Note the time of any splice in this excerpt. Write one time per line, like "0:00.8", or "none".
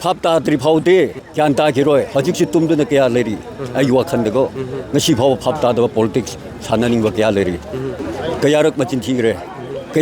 0:08.0